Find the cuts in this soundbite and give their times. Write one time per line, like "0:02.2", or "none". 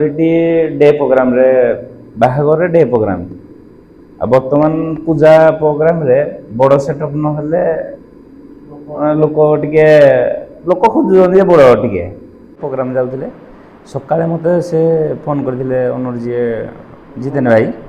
0:12.5